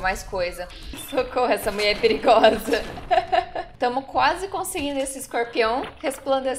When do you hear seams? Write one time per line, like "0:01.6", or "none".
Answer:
0:01.0
0:03.6